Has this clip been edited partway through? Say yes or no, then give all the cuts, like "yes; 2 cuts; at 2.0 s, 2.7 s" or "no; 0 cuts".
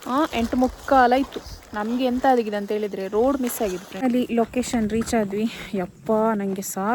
yes; 1 cut; at 4.0 s